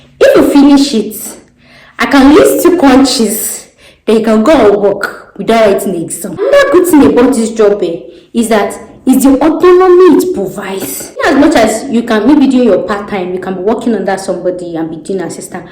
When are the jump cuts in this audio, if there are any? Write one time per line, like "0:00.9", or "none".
0:06.5
0:11.2